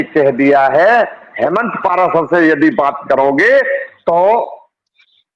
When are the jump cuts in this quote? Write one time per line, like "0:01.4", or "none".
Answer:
0:01.2